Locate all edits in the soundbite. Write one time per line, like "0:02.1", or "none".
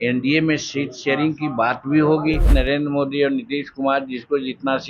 0:02.5

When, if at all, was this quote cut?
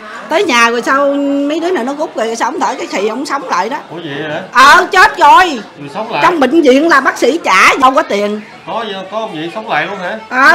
0:07.8

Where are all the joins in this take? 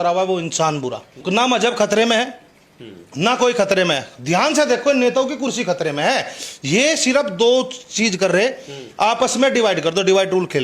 none

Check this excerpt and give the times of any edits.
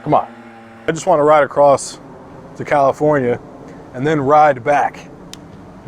0:00.9

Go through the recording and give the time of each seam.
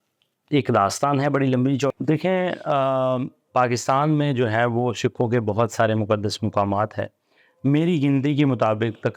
0:01.9

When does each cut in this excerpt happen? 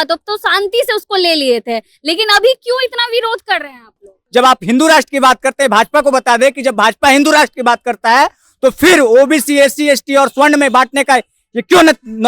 0:04.2

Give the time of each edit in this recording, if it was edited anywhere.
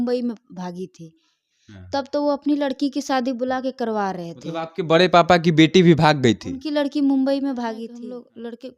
0:07.9

